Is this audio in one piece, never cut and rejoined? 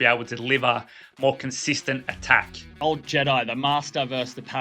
no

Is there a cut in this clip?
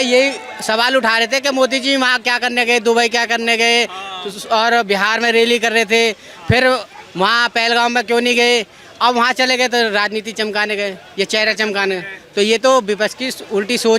no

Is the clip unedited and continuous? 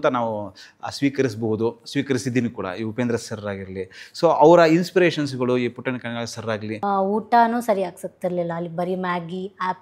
no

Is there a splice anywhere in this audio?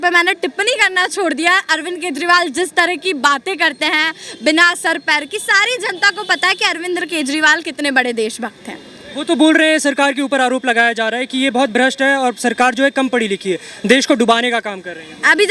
no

